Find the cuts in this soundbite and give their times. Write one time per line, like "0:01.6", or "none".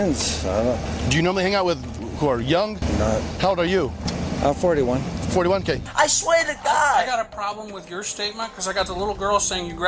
0:00.8
0:02.0
0:03.3
0:05.8